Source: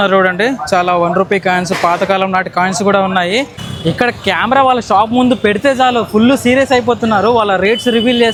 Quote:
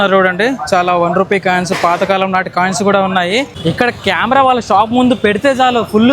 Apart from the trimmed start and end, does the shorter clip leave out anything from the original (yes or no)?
yes